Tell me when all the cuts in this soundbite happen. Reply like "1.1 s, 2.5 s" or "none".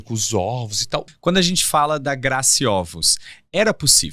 1.1 s